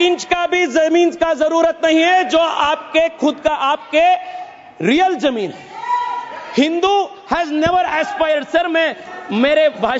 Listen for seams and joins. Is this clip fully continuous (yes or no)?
yes